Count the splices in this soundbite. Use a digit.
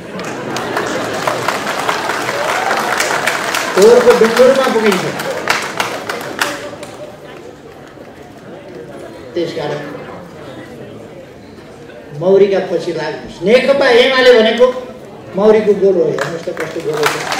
0